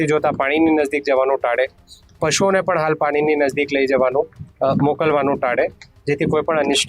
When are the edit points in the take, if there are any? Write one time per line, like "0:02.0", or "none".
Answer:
none